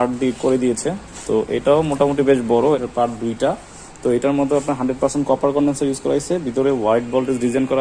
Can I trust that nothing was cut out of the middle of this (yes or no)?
yes